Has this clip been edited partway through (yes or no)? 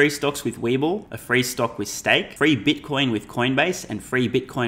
yes